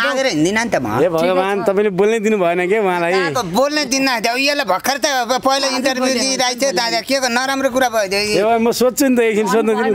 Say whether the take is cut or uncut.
uncut